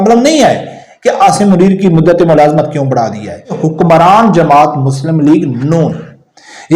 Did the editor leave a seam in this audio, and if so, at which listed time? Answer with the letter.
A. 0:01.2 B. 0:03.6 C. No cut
B